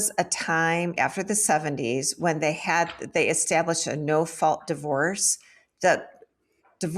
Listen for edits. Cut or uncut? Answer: cut